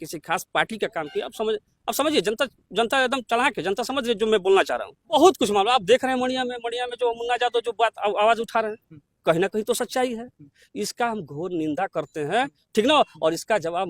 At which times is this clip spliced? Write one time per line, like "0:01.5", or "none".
0:05.1